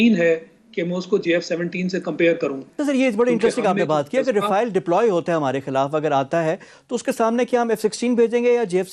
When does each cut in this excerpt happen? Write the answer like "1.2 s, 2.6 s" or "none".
2.7 s